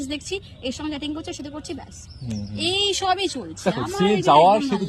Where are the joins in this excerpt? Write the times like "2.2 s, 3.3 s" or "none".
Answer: none

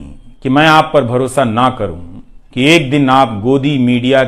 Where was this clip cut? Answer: none

